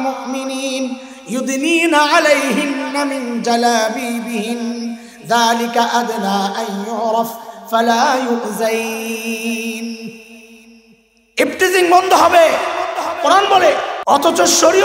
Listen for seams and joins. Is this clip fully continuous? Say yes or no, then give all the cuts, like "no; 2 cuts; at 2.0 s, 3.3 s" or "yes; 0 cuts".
no; 1 cut; at 13.9 s